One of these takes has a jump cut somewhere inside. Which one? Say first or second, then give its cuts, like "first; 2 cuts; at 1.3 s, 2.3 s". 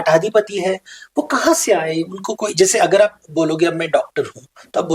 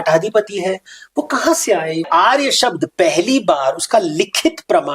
second; 1 cut; at 2.1 s